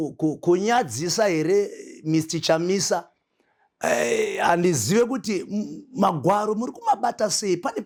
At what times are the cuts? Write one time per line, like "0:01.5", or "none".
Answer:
none